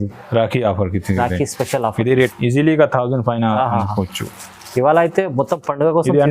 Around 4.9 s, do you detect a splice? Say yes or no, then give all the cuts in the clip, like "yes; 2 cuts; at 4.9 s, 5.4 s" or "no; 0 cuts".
no; 1 cut; at 2.3 s